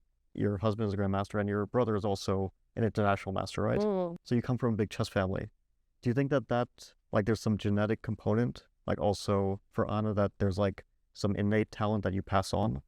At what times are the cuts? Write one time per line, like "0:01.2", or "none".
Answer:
none